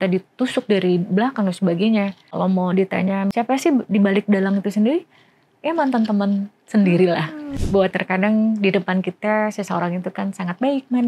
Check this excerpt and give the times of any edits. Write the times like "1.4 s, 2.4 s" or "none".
2.2 s, 3.3 s, 7.4 s